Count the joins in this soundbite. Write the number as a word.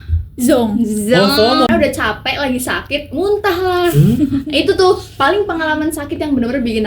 one